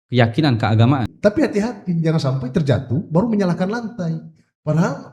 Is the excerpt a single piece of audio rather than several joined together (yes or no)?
no